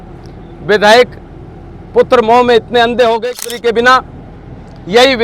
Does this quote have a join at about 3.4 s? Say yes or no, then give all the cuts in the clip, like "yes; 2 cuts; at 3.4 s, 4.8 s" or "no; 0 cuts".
yes; 1 cut; at 3.4 s